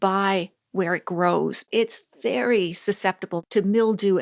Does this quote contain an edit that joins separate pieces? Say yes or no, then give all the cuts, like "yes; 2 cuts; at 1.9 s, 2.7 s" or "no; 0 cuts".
yes; 2 cuts; at 1.6 s, 3.3 s